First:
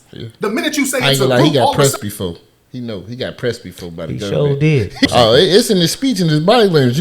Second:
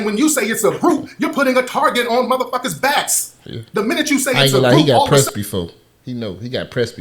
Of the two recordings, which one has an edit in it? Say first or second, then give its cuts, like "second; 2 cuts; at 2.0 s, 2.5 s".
first; 1 cut; at 5.1 s